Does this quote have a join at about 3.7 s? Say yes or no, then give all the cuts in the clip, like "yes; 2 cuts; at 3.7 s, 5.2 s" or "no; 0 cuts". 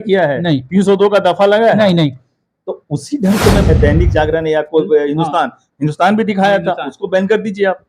yes; 1 cut; at 3.7 s